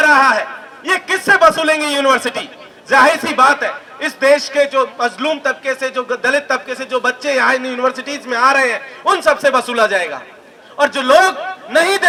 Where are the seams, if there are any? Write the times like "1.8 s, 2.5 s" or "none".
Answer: none